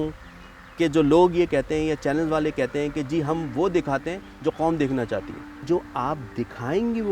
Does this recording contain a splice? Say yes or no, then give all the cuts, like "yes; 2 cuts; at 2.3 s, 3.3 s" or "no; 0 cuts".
yes; 1 cut; at 5.6 s